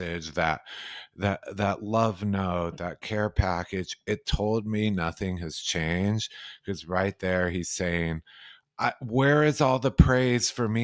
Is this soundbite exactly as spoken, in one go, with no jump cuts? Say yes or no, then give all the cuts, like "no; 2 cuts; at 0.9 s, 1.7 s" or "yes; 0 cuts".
yes; 0 cuts